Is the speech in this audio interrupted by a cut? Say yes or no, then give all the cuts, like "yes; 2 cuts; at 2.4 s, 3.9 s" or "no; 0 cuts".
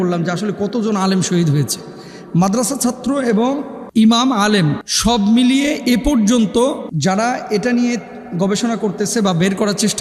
no; 0 cuts